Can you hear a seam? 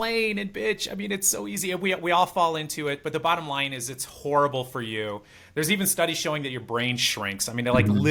no; 0 cuts

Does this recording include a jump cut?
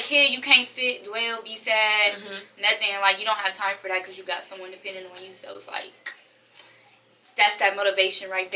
no; 0 cuts

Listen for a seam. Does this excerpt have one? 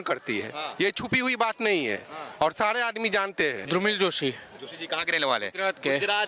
yes; 1 cut; at 3.6 s

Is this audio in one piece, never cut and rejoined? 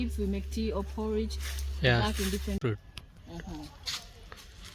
no; 1 cut; at 2.6 s

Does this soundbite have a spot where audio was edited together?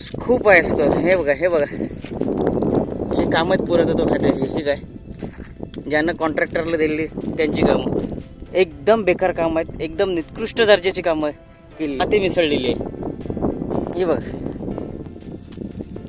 no; 0 cuts

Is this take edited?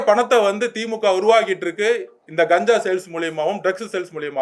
no; 0 cuts

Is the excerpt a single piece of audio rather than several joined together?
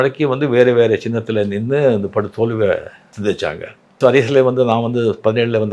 no; 1 cut; at 3.9 s

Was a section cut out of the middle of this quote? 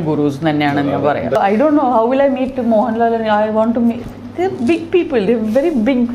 yes; 1 cut; at 1.4 s

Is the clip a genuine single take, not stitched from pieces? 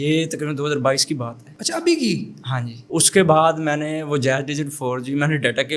yes; 0 cuts

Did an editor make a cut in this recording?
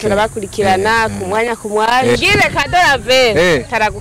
yes; 1 cut; at 2.2 s

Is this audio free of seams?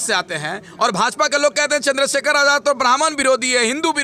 yes; 0 cuts

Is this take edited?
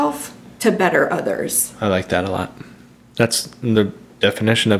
no; 0 cuts

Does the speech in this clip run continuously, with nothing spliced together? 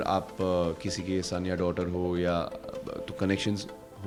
yes; 0 cuts

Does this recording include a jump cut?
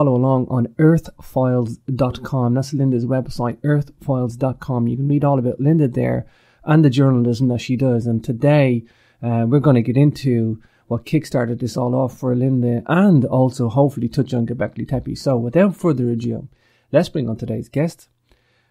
no; 0 cuts

